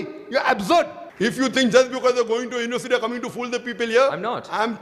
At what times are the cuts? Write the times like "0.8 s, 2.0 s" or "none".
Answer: 1.0 s